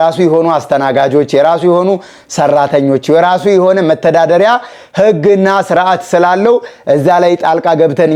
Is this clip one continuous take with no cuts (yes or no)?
yes